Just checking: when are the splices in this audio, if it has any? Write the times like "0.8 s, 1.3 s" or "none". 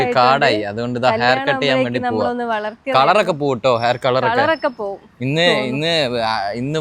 none

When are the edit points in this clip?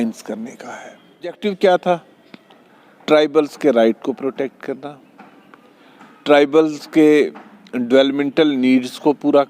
1.4 s

